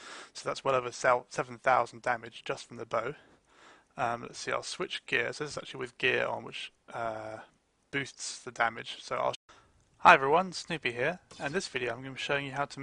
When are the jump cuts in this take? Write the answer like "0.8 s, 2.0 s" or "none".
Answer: none